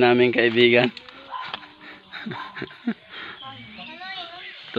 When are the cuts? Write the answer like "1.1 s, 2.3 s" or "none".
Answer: 1.1 s